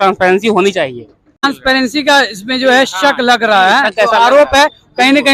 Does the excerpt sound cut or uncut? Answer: cut